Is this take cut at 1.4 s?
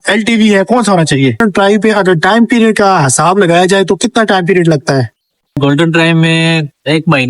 yes; 2 cuts; at 1.4 s, 5.2 s

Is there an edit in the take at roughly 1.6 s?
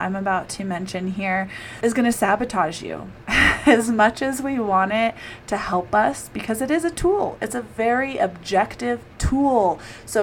yes; 1 cut; at 1.6 s

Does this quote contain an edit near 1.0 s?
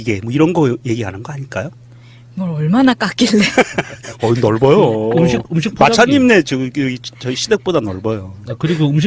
yes; 1 cut; at 1.0 s

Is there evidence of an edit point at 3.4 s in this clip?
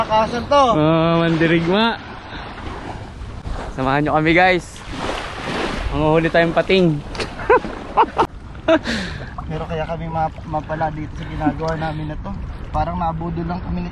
yes; 2 cuts; at 3.4 s, 8.3 s

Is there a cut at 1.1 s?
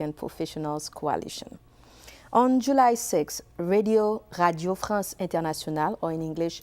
no; 1 cut; at 2.4 s

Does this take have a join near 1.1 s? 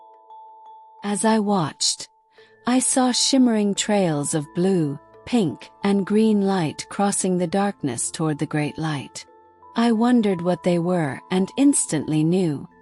yes; 1 cut; at 1.1 s

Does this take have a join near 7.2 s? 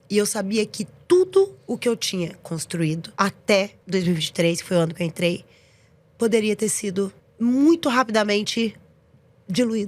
yes; 3 cuts; at 3.1 s, 3.8 s, 7.2 s

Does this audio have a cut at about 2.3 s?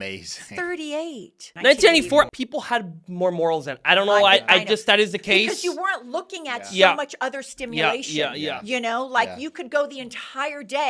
yes; 2 cuts; at 1.4 s, 2.3 s

